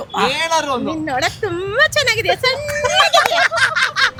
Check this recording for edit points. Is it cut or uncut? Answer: uncut